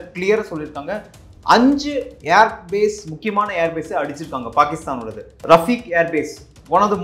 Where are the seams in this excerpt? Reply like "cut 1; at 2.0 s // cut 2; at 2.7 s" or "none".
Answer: cut 1; at 5.3 s

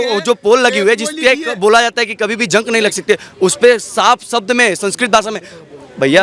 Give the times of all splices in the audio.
none

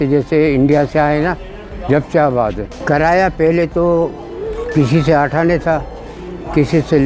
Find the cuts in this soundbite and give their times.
cut 1; at 2.7 s

